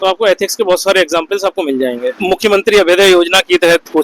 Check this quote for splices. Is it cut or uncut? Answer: cut